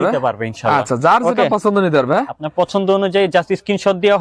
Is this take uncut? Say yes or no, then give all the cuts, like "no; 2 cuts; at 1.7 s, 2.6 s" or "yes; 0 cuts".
yes; 0 cuts